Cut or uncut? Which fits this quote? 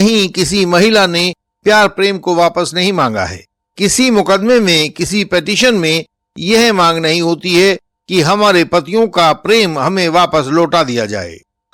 uncut